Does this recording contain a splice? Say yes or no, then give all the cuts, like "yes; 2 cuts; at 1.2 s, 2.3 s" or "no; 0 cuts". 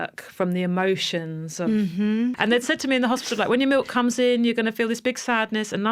yes; 1 cut; at 2.4 s